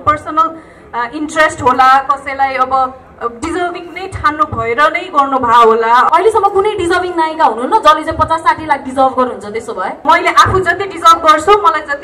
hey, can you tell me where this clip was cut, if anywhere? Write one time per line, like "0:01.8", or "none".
0:06.1
0:10.0

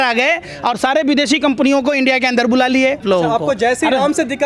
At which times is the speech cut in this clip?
0:03.0

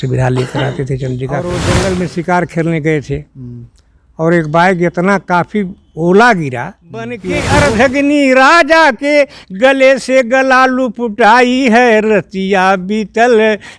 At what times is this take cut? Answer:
0:01.5
0:07.3

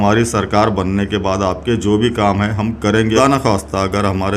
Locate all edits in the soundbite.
0:03.2

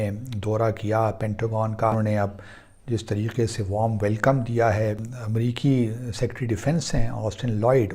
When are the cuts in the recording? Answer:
0:01.9
0:05.1

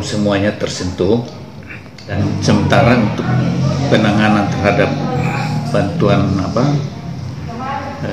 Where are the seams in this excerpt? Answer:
0:02.1

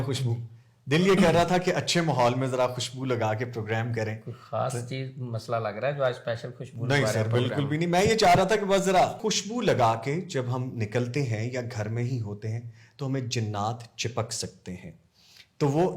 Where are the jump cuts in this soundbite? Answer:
0:09.2

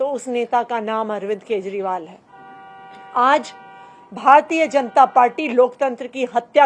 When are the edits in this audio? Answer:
none

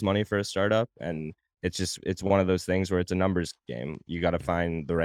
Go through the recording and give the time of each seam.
0:01.0

